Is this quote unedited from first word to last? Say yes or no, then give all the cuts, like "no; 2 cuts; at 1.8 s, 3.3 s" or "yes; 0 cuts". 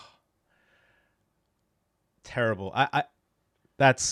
yes; 0 cuts